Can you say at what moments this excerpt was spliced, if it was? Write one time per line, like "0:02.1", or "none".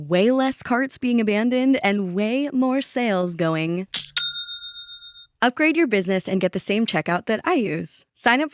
0:05.2